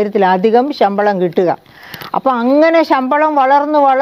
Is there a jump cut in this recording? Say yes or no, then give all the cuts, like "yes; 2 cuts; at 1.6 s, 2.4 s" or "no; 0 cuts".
no; 0 cuts